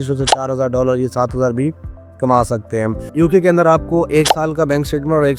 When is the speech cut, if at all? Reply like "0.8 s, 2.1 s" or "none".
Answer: 3.0 s

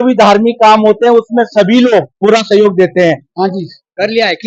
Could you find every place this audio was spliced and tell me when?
2.1 s, 3.2 s

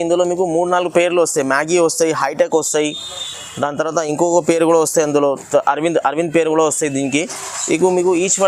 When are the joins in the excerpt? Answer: none

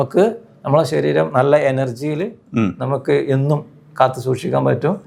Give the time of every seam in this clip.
none

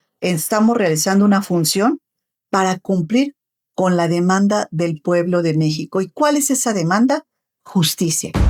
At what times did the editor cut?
none

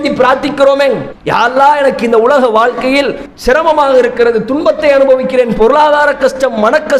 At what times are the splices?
1.1 s, 3.2 s

